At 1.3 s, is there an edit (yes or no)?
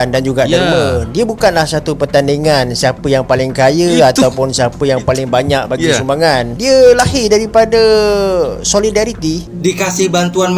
no